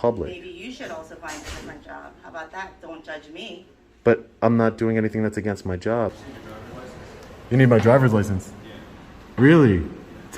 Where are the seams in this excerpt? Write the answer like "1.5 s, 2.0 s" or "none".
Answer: 6.2 s